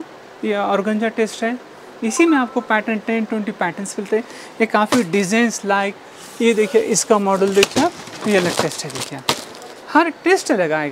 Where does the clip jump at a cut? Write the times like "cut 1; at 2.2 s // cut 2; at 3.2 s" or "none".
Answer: none